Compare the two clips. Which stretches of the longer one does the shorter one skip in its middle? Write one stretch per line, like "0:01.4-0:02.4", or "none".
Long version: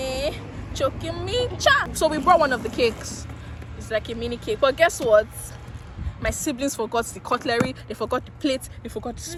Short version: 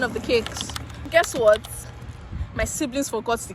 0:03.6-0:04.8